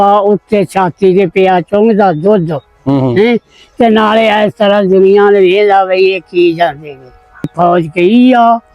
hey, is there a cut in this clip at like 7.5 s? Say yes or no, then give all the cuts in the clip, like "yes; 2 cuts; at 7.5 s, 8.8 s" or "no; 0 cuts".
yes; 1 cut; at 7.5 s